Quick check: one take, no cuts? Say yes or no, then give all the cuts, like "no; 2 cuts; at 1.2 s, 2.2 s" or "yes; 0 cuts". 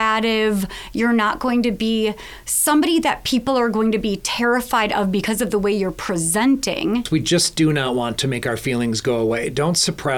no; 1 cut; at 7.1 s